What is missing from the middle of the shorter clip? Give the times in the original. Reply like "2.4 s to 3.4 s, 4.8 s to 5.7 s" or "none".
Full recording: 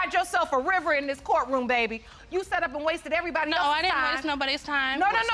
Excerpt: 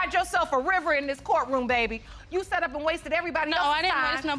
none